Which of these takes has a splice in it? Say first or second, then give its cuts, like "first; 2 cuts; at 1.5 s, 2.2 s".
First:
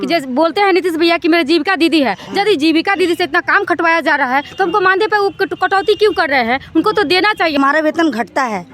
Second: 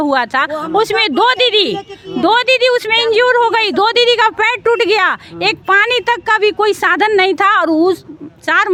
first; 1 cut; at 7.6 s